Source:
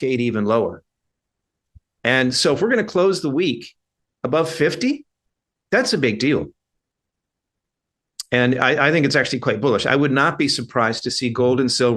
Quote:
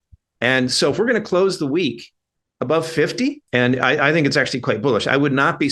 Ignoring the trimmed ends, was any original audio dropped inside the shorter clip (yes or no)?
yes